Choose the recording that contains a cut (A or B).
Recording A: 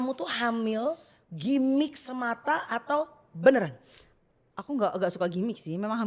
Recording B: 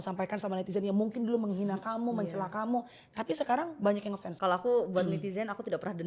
B